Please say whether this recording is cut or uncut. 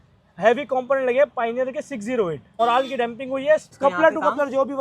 cut